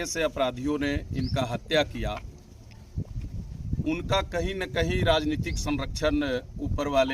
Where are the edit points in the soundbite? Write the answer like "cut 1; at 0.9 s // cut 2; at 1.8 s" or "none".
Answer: none